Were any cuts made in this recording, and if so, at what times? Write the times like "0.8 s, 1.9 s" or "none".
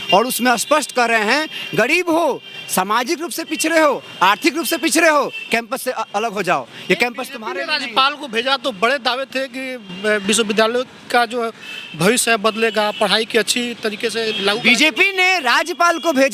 none

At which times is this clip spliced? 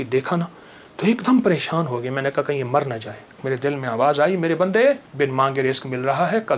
3.4 s, 5.1 s

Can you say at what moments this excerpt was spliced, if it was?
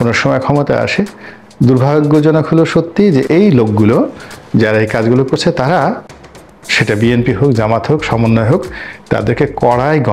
6.1 s

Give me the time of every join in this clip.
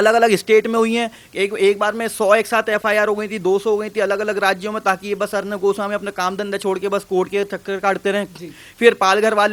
none

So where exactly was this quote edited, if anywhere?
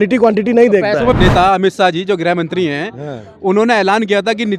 1.1 s

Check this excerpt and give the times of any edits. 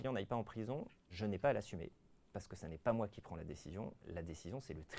none

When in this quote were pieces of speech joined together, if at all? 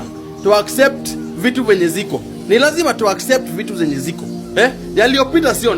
none

